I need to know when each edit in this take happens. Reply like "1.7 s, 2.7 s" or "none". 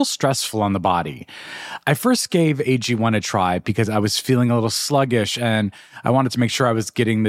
none

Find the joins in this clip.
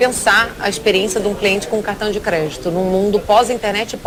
none

